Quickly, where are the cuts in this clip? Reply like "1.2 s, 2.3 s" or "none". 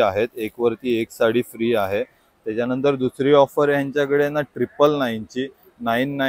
none